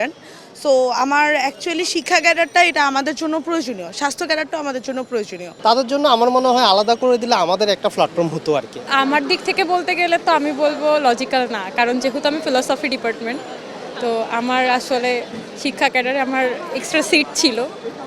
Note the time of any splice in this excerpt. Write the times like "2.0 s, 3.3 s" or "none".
5.4 s, 8.8 s